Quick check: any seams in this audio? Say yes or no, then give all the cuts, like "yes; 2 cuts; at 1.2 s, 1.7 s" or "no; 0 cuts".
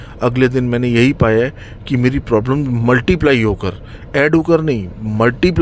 no; 0 cuts